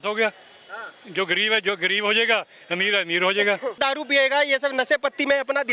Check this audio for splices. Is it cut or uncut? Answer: cut